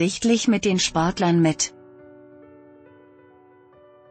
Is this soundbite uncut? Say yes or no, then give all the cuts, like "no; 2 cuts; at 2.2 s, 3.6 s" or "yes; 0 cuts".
no; 1 cut; at 1.7 s